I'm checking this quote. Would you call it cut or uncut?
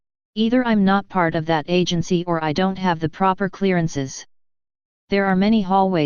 uncut